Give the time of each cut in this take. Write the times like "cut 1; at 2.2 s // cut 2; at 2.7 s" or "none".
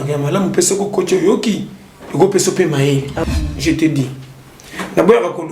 cut 1; at 3.2 s